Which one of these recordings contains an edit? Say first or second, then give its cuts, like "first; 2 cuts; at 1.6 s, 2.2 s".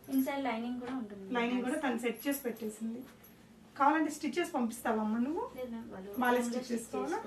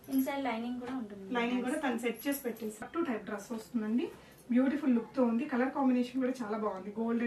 second; 1 cut; at 2.8 s